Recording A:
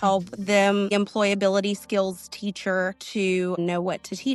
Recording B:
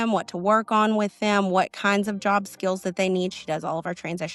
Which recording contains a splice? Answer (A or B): A